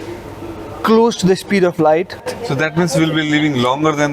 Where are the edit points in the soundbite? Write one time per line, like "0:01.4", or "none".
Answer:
0:02.4